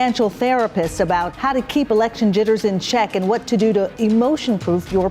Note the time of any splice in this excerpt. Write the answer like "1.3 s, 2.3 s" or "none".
1.3 s